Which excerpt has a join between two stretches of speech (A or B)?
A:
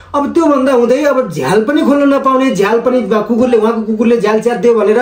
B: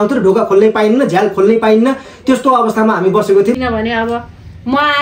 B